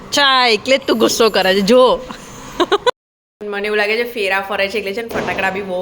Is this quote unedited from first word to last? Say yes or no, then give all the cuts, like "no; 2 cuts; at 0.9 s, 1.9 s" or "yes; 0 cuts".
no; 1 cut; at 2.9 s